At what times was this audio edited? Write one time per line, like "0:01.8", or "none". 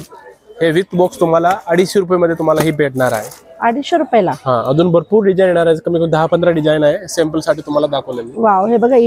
none